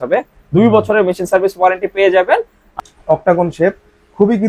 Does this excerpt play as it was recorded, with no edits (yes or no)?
no